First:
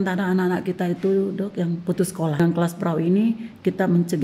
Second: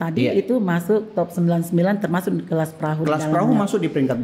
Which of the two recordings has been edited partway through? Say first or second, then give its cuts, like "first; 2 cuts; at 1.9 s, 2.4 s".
first; 1 cut; at 2.4 s